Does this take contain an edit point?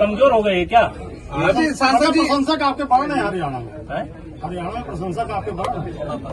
yes; 1 cut; at 1.6 s

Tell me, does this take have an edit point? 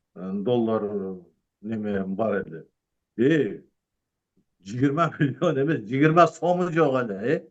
no; 0 cuts

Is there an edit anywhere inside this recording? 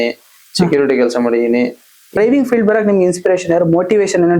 yes; 1 cut; at 2.2 s

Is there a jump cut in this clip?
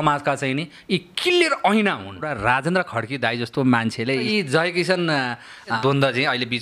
yes; 3 cuts; at 2.3 s, 4.3 s, 5.8 s

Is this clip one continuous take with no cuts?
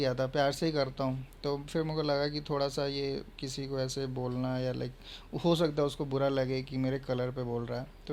yes; 0 cuts

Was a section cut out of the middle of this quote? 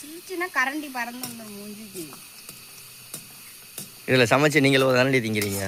no; 0 cuts

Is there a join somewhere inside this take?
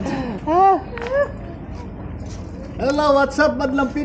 no; 0 cuts

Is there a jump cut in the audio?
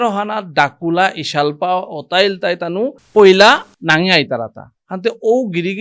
yes; 1 cut; at 3.0 s

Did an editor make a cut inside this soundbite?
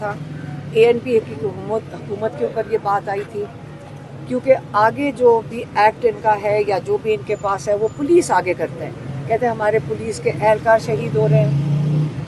no; 0 cuts

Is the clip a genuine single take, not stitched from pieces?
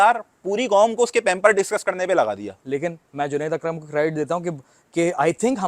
no; 1 cut; at 2.5 s

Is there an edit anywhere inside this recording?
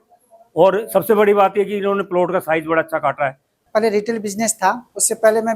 yes; 1 cut; at 3.6 s

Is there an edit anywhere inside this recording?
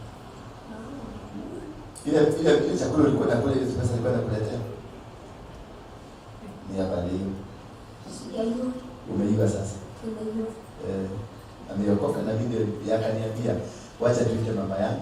no; 0 cuts

